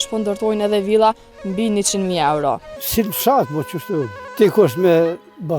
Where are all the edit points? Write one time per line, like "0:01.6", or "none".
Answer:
0:02.8
0:04.2